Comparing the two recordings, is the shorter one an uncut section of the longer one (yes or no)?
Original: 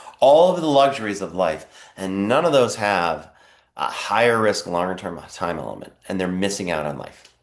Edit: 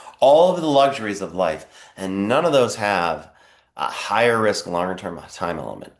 yes